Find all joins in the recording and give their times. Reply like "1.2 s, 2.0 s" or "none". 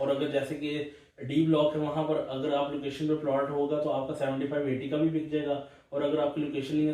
none